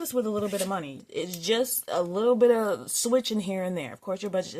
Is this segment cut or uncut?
cut